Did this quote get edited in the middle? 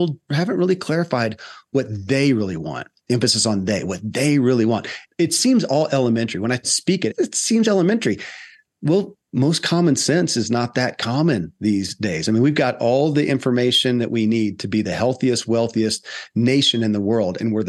no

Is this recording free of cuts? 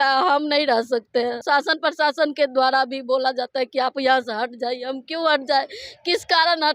no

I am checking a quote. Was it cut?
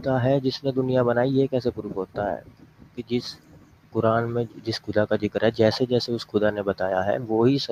no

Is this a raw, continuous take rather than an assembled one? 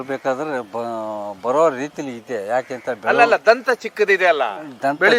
yes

